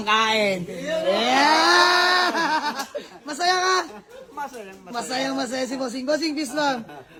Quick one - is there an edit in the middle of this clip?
no; 0 cuts

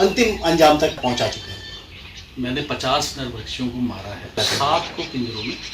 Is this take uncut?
no; 2 cuts; at 1.0 s, 4.4 s

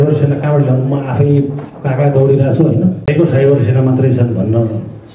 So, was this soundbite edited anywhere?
yes; 1 cut; at 3.0 s

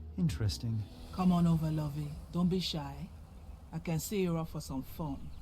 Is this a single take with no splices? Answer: no; 2 cuts; at 1.0 s, 2.2 s

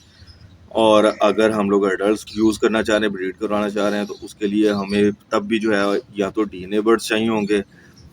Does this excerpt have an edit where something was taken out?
yes; 1 cut; at 2.2 s

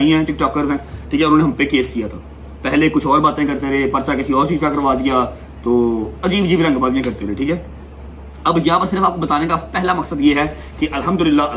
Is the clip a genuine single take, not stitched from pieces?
yes; 0 cuts

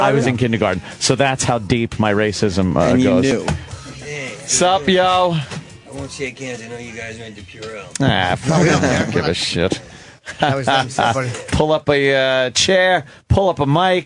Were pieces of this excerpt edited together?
yes; 1 cut; at 7.4 s

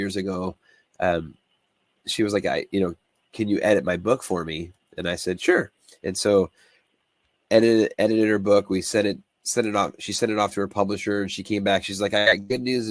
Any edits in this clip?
no; 0 cuts

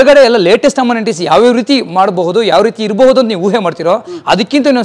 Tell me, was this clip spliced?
no; 0 cuts

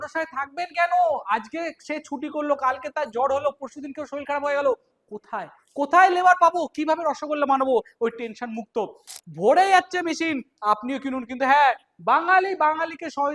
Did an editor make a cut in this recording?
yes; 1 cut; at 9.1 s

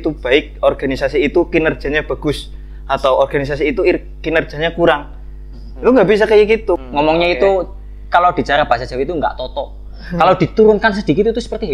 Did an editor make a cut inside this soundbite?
yes; 1 cut; at 6.8 s

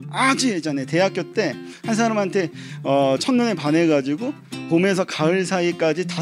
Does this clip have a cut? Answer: no; 0 cuts

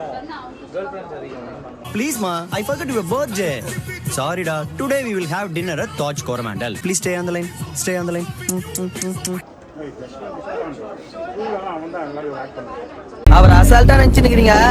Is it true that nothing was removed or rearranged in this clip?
no; 1 cut; at 9.4 s

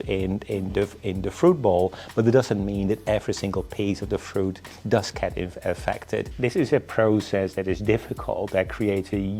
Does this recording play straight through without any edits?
no; 1 cut; at 6.3 s

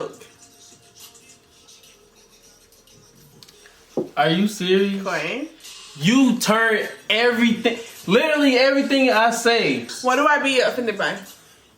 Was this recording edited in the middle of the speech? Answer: yes; 1 cut; at 9.9 s

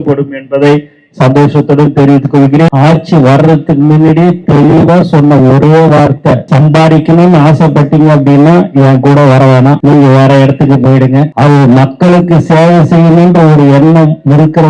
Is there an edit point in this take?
yes; 4 cuts; at 2.7 s, 6.4 s, 9.8 s, 11.3 s

